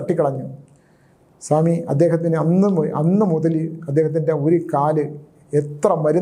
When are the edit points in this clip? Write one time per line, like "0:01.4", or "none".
none